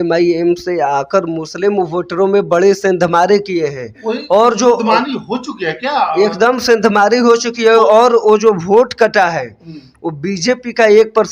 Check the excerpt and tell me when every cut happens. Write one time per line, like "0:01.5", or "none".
none